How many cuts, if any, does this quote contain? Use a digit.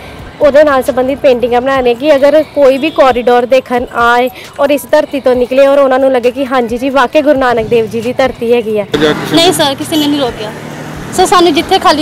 1